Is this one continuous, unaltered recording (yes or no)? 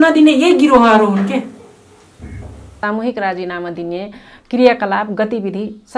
no